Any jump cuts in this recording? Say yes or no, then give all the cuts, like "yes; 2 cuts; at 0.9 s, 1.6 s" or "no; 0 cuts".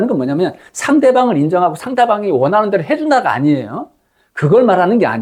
no; 0 cuts